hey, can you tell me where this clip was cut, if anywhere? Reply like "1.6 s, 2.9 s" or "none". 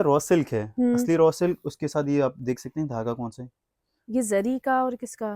none